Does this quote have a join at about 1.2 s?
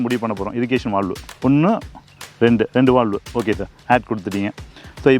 yes; 1 cut; at 1.2 s

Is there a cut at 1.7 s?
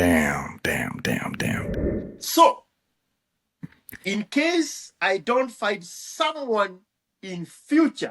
yes; 1 cut; at 1.7 s

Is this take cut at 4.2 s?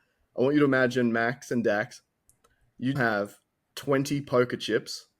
no; 1 cut; at 3.0 s

